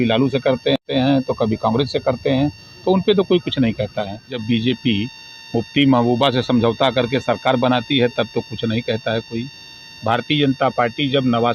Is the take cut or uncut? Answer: cut